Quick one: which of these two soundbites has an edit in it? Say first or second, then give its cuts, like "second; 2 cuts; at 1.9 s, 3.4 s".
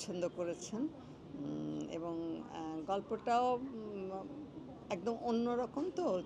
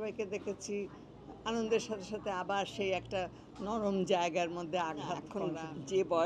second; 1 cut; at 5.3 s